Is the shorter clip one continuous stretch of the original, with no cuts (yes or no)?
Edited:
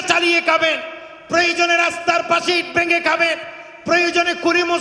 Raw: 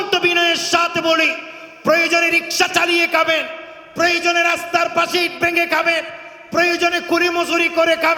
yes